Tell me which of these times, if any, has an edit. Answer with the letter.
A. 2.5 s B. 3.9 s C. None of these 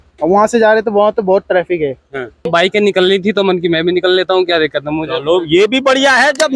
A